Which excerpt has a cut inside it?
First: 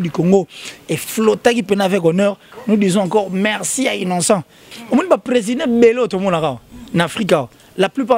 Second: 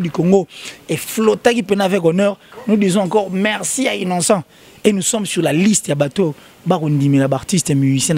first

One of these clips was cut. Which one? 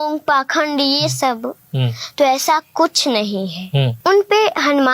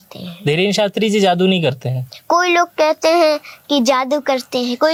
first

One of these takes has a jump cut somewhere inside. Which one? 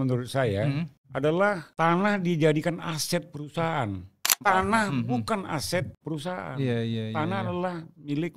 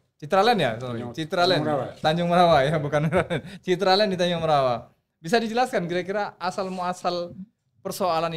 first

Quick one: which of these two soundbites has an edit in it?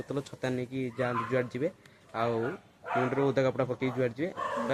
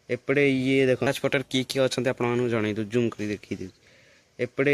second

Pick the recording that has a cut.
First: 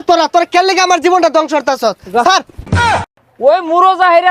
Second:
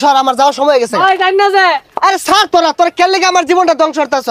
first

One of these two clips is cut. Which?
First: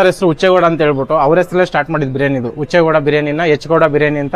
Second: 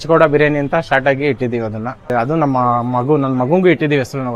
second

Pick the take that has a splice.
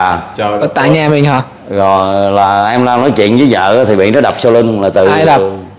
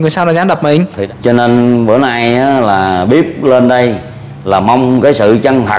second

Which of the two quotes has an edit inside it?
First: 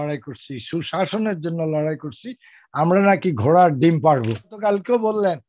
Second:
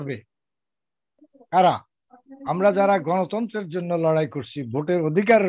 first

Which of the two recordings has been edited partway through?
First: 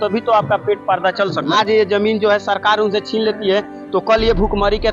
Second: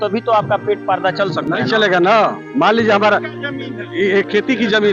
first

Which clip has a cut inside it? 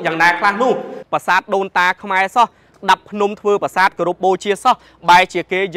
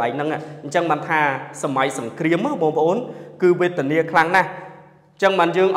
first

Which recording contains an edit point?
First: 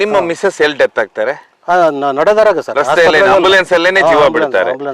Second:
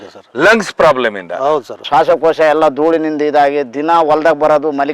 second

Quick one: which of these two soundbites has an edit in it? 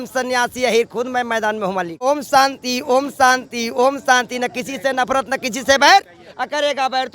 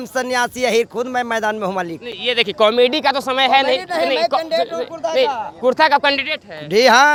first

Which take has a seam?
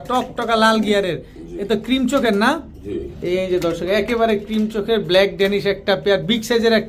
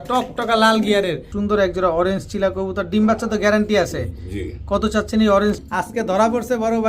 second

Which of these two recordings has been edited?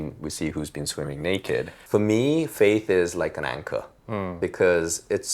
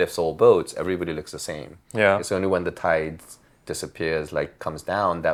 first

